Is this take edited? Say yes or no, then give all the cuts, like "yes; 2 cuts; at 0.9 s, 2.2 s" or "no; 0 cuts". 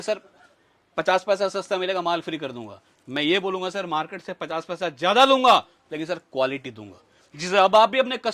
no; 0 cuts